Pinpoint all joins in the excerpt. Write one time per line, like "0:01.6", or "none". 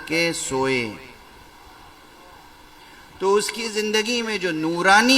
none